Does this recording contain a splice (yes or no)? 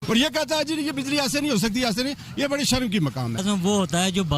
yes